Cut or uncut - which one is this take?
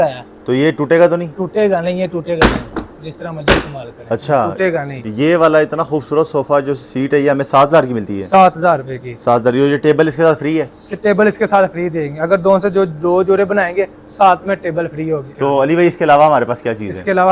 cut